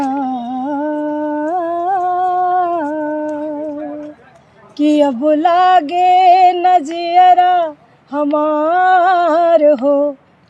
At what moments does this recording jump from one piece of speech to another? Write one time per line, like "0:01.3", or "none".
none